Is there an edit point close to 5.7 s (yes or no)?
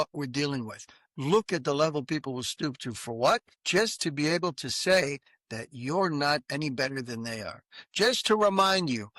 no